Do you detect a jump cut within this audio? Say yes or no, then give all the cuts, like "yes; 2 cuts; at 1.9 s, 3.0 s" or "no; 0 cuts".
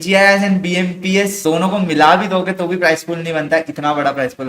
yes; 1 cut; at 1.4 s